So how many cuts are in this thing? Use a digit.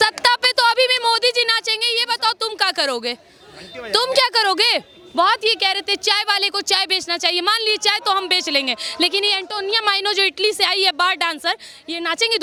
0